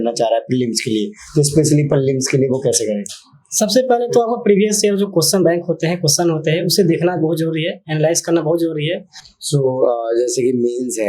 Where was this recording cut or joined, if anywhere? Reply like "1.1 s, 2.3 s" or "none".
9.2 s